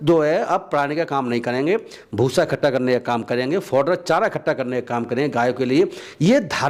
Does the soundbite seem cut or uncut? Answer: uncut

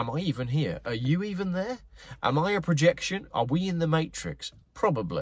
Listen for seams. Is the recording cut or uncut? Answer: uncut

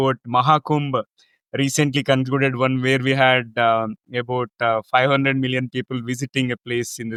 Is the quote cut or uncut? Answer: uncut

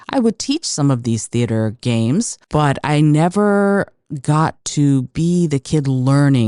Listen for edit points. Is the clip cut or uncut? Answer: cut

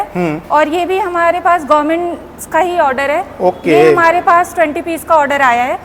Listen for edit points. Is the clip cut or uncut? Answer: uncut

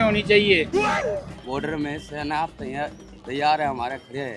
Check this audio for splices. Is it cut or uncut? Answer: cut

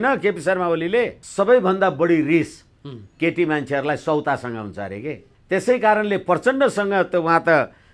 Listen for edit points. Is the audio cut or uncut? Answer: cut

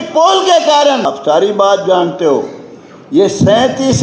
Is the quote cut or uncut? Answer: cut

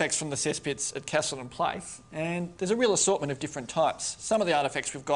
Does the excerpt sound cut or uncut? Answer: cut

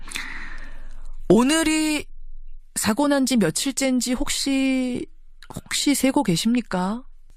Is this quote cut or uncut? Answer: uncut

